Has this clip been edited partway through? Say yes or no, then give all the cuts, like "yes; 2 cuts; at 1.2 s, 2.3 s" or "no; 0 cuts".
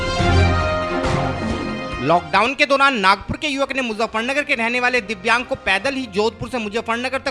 yes; 1 cut; at 1.4 s